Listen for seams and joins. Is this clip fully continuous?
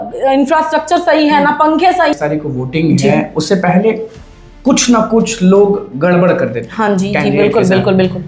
no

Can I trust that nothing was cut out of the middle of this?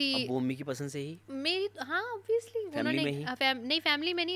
no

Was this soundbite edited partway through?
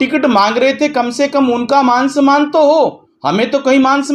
no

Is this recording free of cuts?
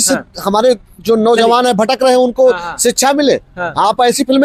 yes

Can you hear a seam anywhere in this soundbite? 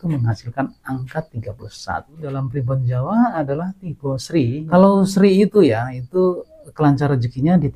yes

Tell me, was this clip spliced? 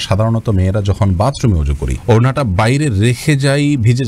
no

